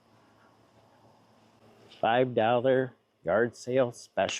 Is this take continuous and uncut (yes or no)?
no